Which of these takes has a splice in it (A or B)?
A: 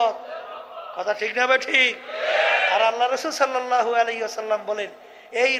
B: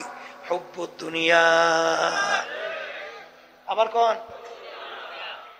B